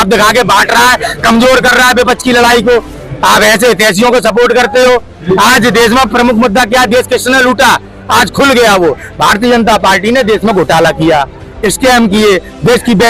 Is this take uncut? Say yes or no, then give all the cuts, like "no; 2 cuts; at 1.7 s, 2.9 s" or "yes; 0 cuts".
yes; 0 cuts